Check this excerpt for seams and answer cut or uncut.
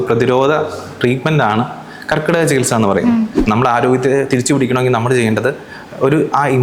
cut